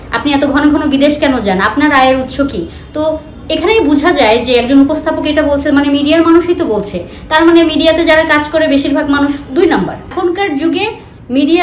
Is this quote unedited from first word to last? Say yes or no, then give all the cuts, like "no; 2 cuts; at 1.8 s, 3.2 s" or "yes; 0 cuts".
no; 1 cut; at 10.1 s